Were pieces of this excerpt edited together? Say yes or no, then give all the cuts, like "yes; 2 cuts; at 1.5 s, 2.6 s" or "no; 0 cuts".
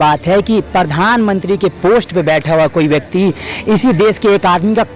no; 0 cuts